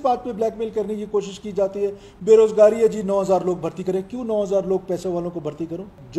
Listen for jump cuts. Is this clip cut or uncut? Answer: uncut